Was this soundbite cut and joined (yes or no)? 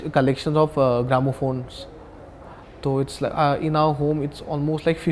no